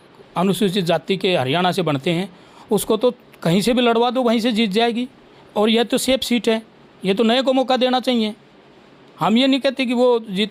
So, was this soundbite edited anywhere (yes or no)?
no